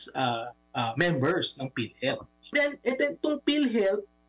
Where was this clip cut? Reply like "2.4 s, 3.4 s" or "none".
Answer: 2.5 s